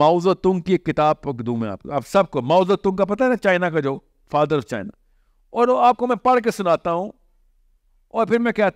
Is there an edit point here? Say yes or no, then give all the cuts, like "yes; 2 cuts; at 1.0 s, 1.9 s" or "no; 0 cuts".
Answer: no; 0 cuts